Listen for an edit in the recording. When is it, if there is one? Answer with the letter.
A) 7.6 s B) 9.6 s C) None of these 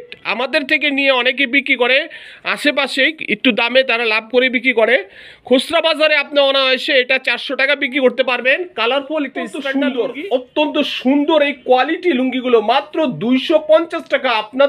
B